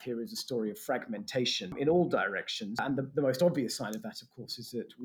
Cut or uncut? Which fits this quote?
cut